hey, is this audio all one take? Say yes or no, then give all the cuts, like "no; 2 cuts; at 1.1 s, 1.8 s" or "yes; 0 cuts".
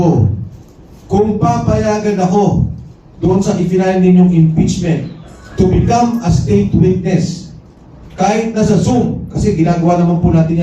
yes; 0 cuts